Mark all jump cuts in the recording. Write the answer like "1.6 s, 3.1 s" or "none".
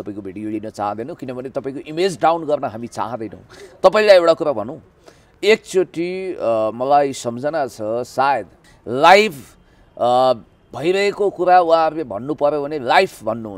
8.6 s